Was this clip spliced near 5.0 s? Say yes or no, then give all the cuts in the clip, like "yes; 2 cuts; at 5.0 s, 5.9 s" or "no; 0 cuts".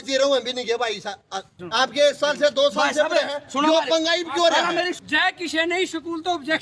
yes; 2 cuts; at 1.6 s, 5.0 s